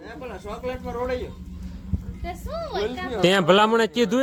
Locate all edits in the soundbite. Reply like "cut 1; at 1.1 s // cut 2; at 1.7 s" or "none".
none